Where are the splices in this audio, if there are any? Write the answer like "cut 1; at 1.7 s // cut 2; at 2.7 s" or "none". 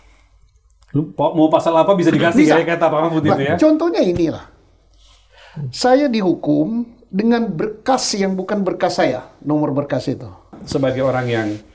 cut 1; at 10.6 s